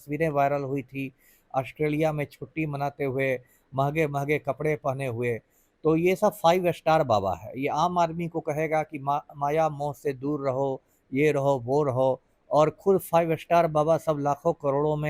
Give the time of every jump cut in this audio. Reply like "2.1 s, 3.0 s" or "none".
none